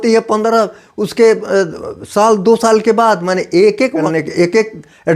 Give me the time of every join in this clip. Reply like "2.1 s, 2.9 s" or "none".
4.0 s